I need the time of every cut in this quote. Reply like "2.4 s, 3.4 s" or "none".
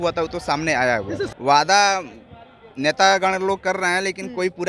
1.3 s